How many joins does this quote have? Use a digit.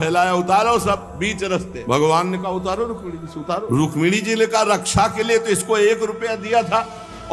2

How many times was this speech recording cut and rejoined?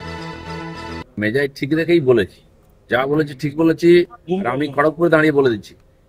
1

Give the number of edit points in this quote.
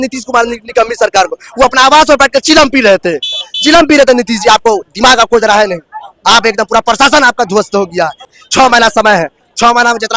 1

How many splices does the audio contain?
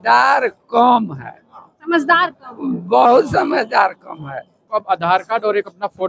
1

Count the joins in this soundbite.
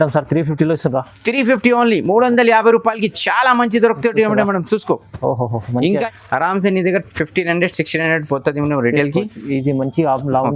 1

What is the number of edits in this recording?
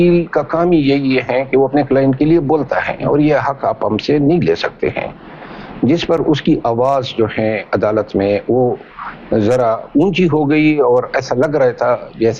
0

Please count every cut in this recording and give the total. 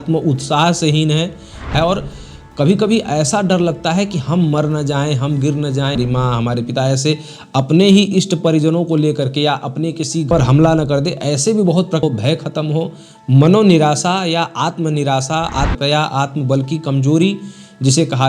5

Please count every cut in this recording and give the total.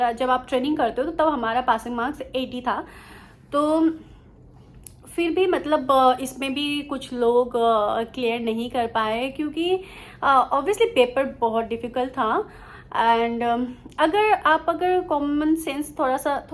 0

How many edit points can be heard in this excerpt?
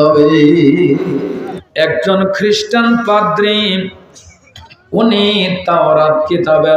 1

